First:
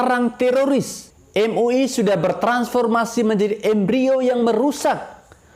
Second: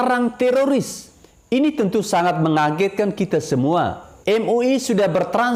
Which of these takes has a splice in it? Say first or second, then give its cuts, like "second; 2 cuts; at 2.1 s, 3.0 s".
first; 1 cut; at 1.1 s